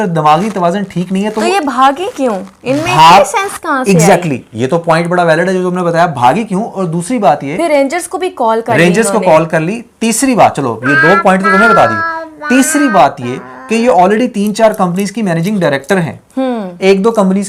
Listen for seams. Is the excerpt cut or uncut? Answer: uncut